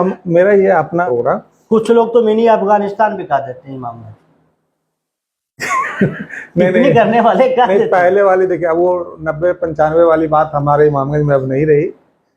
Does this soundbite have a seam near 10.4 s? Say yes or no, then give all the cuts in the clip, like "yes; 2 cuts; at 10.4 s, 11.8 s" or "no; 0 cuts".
no; 1 cut; at 1.0 s